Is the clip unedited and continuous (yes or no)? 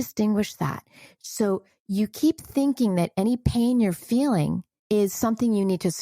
no